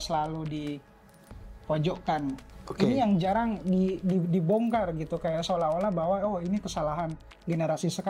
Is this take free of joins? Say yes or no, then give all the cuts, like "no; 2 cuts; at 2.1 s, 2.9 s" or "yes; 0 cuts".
no; 1 cut; at 2.5 s